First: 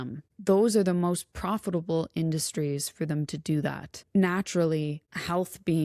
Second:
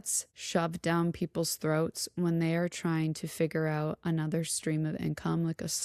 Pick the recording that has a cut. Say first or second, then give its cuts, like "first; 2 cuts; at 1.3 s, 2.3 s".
first; 1 cut; at 3.9 s